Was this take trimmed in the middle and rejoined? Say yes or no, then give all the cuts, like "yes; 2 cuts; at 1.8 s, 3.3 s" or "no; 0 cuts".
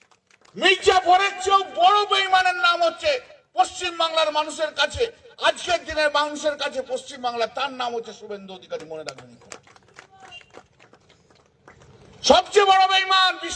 no; 0 cuts